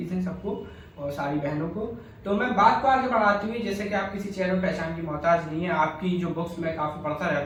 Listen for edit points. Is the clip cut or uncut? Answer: uncut